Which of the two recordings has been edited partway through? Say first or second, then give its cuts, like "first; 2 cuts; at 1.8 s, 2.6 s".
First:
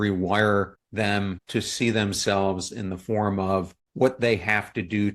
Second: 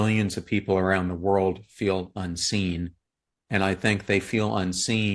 first; 2 cuts; at 1.2 s, 3.8 s